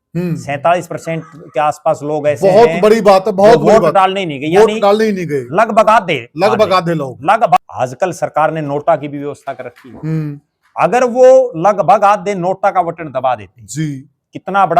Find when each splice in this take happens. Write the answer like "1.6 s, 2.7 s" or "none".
7.6 s

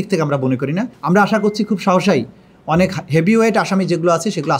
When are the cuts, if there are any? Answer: 0.9 s

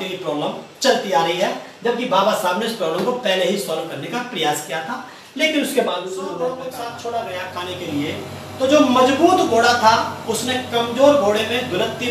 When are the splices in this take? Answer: 6.3 s

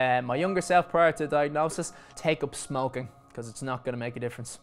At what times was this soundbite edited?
2.0 s

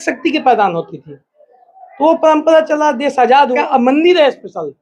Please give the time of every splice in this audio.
3.6 s

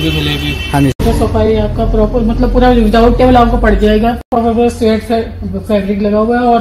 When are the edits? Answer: 1.5 s, 4.3 s

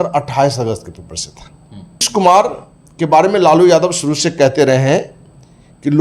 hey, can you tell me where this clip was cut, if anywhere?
2.1 s

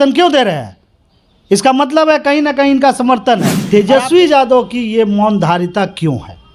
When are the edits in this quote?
3.5 s

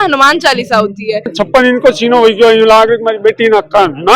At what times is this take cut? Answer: 1.3 s

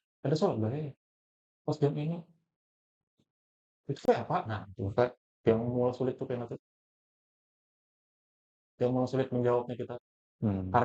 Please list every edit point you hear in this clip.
none

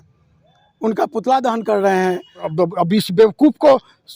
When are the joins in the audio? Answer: 2.5 s

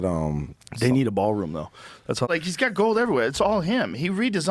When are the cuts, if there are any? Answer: 2.3 s

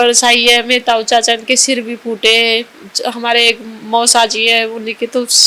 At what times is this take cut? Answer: none

